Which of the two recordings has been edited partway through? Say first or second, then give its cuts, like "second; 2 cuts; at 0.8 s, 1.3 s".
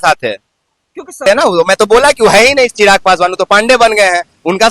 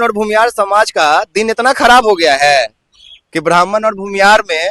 first; 1 cut; at 1.2 s